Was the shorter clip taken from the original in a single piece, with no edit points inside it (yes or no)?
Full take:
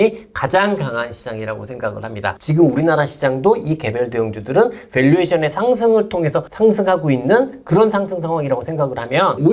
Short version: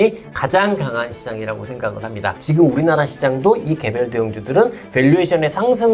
yes